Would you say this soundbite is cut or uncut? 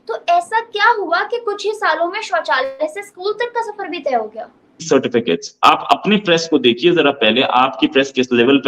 cut